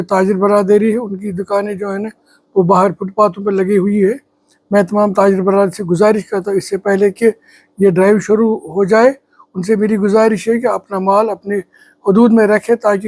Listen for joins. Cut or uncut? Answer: uncut